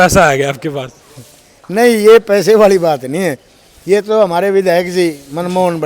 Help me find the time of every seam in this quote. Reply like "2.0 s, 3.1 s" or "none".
none